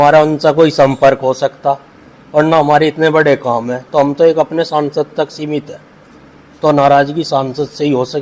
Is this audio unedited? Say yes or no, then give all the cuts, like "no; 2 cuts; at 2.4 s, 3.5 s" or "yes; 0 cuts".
yes; 0 cuts